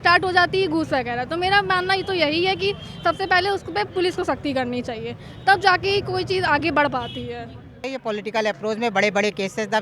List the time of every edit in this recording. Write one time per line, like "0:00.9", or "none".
0:07.9